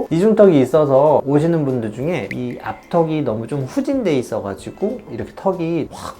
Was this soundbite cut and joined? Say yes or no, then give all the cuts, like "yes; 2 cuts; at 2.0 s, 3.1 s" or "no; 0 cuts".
yes; 2 cuts; at 1.2 s, 5.1 s